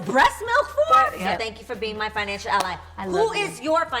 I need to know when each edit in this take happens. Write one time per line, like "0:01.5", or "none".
0:01.2